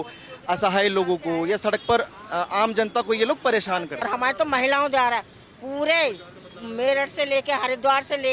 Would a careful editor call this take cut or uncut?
cut